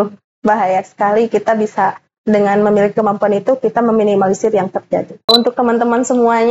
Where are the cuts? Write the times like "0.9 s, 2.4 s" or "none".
5.3 s

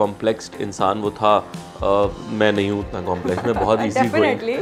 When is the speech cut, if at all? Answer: none

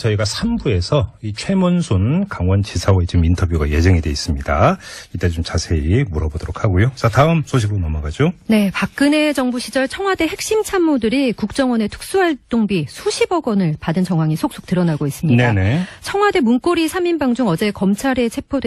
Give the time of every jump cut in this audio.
11.2 s

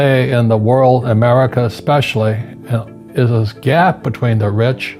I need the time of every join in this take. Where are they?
none

